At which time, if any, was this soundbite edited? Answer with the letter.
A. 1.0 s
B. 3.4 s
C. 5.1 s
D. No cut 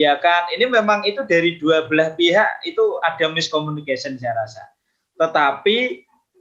D